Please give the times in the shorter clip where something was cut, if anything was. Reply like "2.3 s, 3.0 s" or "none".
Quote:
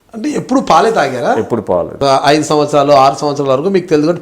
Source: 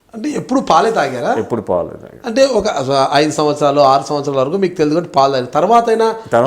2.0 s

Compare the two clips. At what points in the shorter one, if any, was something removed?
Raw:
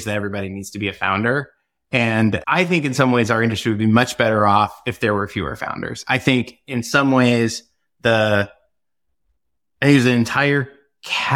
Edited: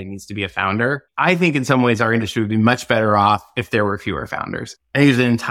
1.1 s, 4.7 s

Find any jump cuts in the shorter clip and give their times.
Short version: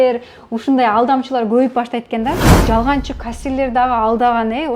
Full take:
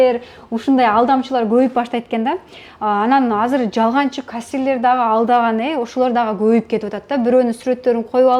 2.6 s

